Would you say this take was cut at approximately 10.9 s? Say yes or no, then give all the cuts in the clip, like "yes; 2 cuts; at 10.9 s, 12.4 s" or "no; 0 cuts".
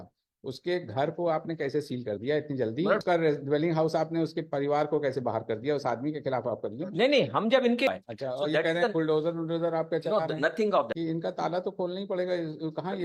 yes; 3 cuts; at 3.0 s, 7.9 s, 10.9 s